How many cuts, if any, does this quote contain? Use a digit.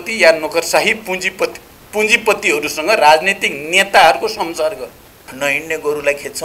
1